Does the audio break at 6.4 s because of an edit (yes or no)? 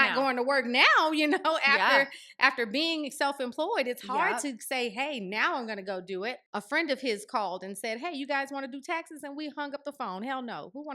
yes